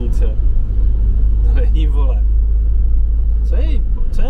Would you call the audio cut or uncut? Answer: uncut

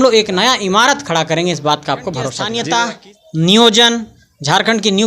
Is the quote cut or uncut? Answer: cut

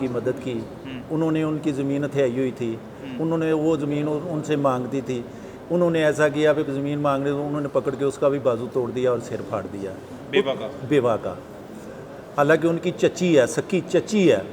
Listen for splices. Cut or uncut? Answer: uncut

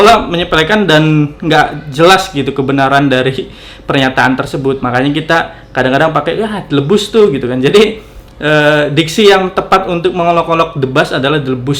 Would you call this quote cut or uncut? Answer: uncut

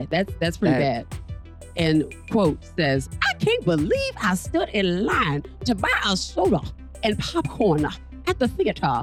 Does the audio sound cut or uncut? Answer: uncut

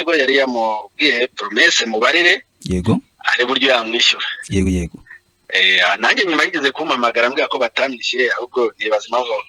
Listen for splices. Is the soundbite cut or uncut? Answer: uncut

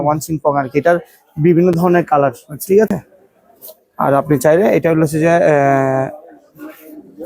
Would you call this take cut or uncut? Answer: uncut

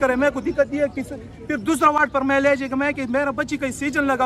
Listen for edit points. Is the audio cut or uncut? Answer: uncut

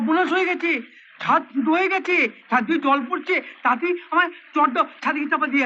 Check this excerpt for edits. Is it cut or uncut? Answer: uncut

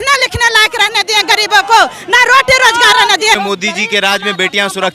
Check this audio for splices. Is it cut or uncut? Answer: cut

